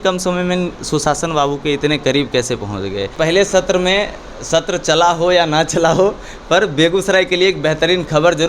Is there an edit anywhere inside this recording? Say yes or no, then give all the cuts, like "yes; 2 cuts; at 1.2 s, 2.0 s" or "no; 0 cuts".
yes; 1 cut; at 3.1 s